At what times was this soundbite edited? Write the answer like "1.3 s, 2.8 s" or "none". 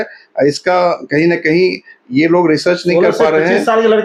none